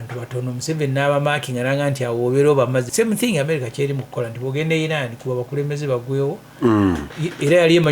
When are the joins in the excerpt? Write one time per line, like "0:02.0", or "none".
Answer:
0:02.9